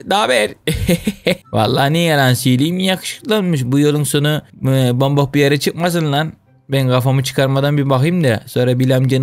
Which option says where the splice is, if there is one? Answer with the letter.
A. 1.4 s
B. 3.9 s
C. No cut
A